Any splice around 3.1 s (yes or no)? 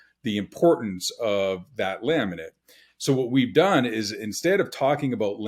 no